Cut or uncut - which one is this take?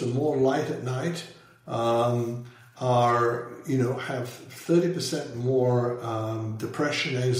uncut